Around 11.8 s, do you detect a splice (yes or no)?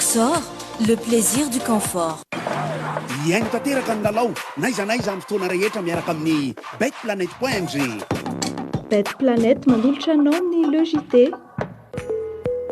yes